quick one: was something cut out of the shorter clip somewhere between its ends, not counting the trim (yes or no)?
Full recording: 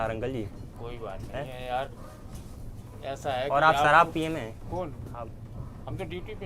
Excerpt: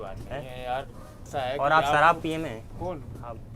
yes